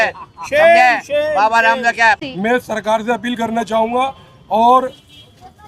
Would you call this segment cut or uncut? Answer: cut